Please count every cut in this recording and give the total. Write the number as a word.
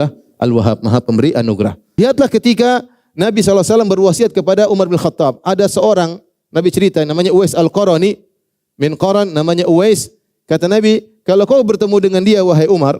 one